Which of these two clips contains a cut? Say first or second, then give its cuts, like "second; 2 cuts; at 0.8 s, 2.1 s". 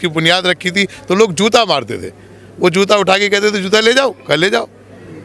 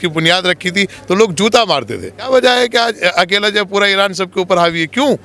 second; 1 cut; at 2.3 s